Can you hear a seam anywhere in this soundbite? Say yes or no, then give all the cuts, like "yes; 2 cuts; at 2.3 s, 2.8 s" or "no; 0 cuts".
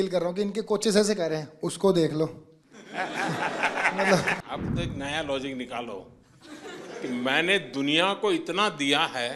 yes; 1 cut; at 4.4 s